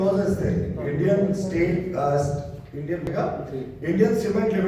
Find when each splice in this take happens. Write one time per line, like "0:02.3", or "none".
0:03.0